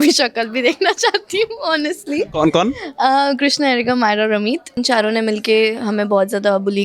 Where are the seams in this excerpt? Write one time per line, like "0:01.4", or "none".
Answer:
0:04.8